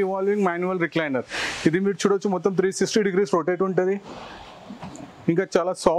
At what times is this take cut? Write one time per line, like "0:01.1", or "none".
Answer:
none